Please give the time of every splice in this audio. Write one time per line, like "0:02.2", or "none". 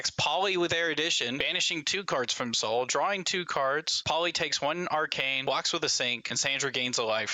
0:01.4
0:03.9
0:05.3
0:06.2